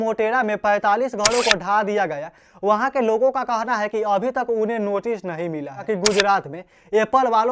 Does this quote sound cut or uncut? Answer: cut